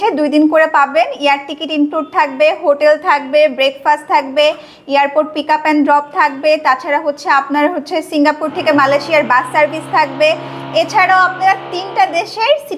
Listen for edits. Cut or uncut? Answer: uncut